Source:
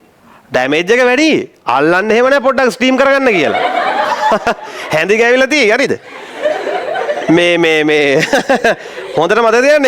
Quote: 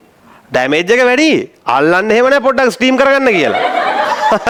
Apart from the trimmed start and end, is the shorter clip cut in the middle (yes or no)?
no